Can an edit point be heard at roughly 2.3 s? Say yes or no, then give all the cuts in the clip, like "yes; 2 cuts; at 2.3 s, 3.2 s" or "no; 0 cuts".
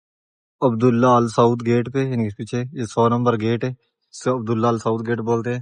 no; 0 cuts